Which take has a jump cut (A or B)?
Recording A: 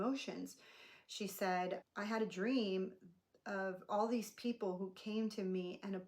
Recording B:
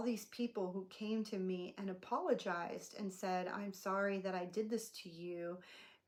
A